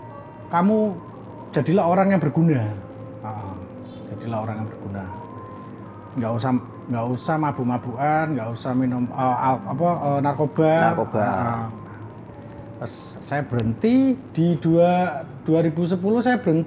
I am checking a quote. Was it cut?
no; 0 cuts

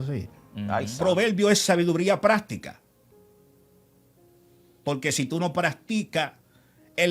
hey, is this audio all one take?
no; 1 cut; at 0.9 s

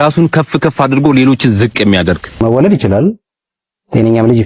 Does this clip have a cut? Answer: yes; 1 cut; at 2.3 s

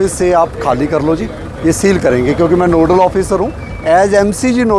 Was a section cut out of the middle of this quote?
no; 0 cuts

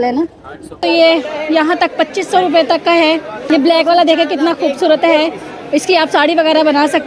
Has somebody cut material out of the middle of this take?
yes; 2 cuts; at 0.8 s, 3.4 s

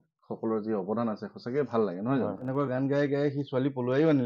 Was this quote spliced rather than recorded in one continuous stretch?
yes; 1 cut; at 2.4 s

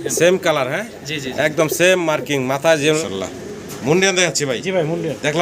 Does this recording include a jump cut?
yes; 1 cut; at 3.0 s

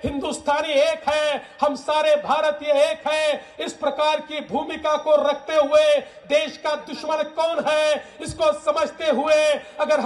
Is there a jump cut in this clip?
no; 0 cuts

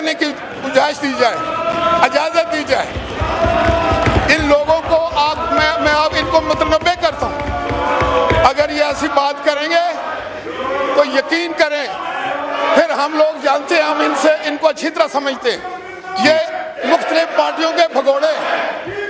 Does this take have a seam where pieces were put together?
no; 0 cuts

